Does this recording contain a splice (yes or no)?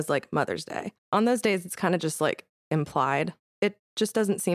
yes